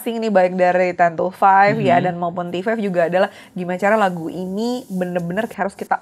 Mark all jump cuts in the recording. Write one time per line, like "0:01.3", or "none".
none